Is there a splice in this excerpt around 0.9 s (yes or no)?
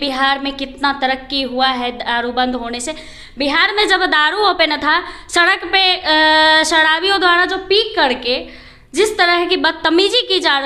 no